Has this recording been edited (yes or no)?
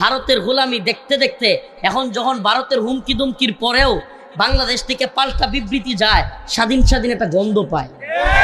no